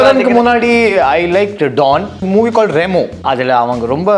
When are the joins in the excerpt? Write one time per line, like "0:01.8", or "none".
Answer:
0:02.2
0:03.2